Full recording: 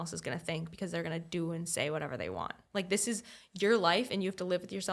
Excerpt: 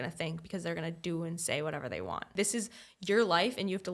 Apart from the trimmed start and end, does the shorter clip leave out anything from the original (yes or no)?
yes